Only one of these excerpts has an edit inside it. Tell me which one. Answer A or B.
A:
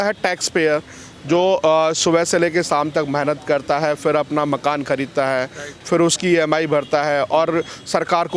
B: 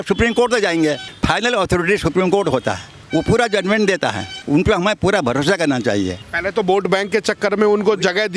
B